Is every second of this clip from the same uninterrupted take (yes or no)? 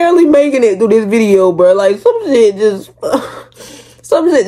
yes